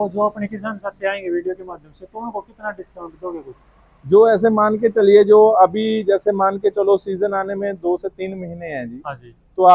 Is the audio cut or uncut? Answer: uncut